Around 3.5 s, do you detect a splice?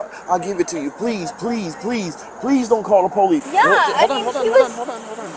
yes; 1 cut; at 3.5 s

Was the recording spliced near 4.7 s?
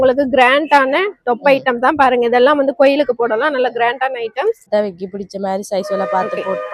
yes; 1 cut; at 4.7 s

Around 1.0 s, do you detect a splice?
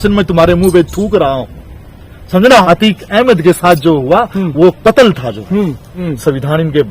no; 2 cuts; at 2.5 s, 5.9 s

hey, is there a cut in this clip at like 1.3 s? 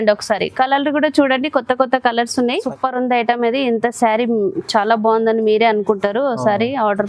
no; 1 cut; at 2.6 s

